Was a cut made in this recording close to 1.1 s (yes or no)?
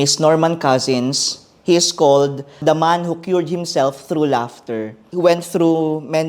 no